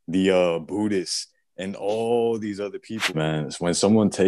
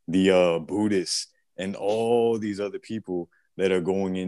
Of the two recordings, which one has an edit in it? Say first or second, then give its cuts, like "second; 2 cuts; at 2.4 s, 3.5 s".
first; 1 cut; at 3.1 s